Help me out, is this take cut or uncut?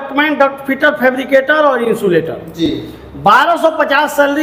uncut